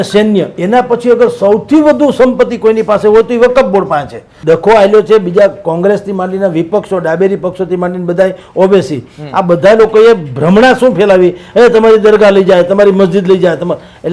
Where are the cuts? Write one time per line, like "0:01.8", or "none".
0:04.3